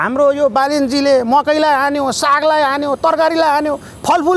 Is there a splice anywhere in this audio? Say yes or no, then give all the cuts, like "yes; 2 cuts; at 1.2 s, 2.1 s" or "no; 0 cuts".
no; 0 cuts